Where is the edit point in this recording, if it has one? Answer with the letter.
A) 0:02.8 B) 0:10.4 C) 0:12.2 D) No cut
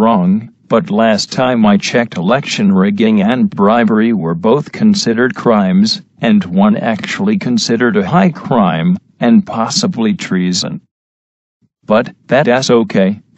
D